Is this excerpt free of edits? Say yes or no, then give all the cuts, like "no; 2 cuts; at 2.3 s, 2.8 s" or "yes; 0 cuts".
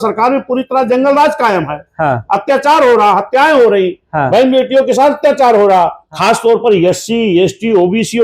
no; 1 cut; at 6.0 s